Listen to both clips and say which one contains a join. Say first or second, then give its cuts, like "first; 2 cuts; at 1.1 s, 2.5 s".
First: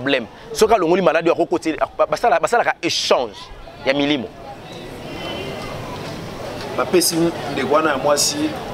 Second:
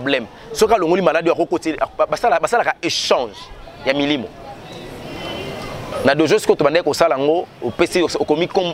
second; 1 cut; at 5.9 s